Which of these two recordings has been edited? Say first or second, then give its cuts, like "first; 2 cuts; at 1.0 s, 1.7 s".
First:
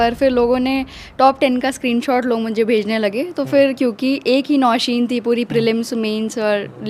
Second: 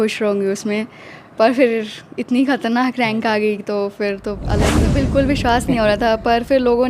second; 1 cut; at 4.7 s